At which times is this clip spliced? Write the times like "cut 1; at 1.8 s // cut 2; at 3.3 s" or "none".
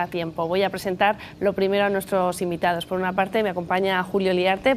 none